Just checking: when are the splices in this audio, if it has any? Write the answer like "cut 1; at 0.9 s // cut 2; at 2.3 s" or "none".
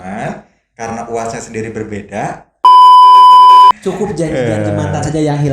cut 1; at 2.4 s // cut 2; at 3.7 s